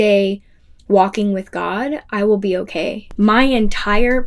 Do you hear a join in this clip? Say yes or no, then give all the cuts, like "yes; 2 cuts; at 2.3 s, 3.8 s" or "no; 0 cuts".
yes; 1 cut; at 3.0 s